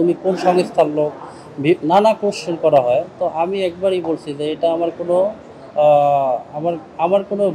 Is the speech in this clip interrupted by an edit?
no; 0 cuts

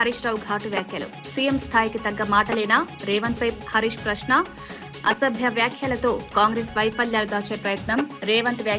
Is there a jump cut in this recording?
no; 0 cuts

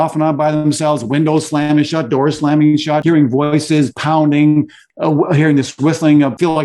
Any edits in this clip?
yes; 2 cuts; at 3.0 s, 4.8 s

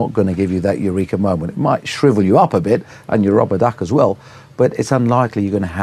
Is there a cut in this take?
no; 0 cuts

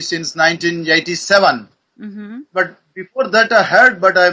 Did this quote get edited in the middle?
no; 0 cuts

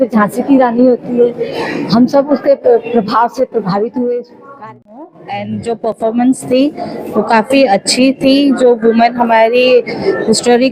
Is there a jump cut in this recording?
yes; 1 cut; at 5.0 s

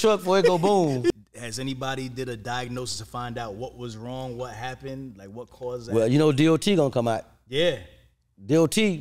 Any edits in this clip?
yes; 1 cut; at 1.1 s

